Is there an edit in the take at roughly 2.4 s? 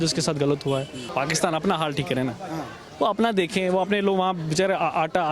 no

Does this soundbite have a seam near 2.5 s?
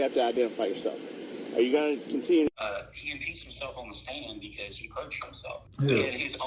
yes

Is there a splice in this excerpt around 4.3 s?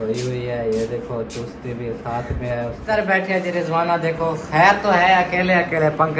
no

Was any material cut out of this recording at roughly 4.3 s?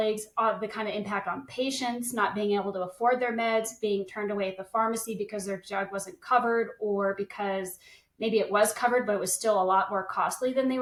no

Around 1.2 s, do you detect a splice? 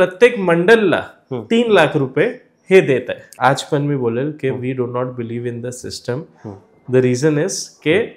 no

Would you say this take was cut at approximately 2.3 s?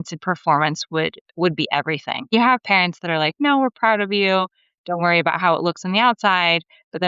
yes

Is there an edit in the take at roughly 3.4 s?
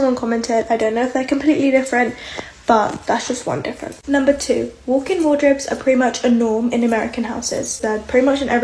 no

